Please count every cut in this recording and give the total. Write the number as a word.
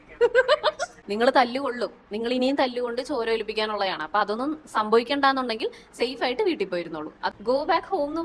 two